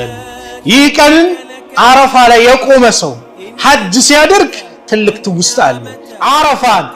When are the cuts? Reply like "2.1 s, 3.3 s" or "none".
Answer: 6.0 s